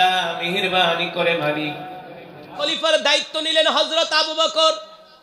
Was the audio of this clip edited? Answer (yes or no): yes